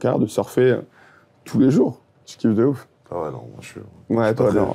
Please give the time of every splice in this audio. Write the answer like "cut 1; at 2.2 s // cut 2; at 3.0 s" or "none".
cut 1; at 2.9 s